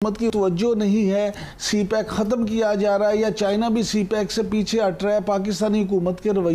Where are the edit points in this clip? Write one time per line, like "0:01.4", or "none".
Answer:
none